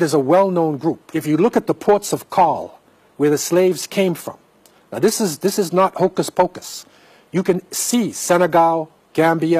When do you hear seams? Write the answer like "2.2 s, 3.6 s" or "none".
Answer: 1.1 s